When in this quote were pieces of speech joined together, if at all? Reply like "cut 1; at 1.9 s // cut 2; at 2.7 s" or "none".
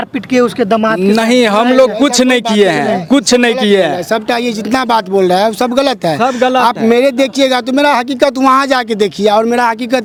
none